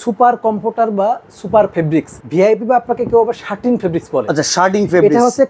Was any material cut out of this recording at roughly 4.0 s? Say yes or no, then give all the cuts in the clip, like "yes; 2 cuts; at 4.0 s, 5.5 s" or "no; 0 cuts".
no; 1 cut; at 2.2 s